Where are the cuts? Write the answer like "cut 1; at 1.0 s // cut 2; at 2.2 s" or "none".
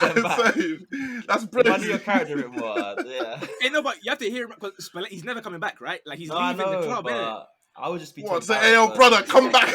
none